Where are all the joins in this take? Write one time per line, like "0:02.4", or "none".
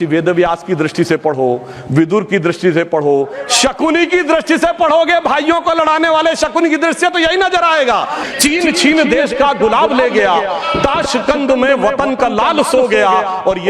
0:08.2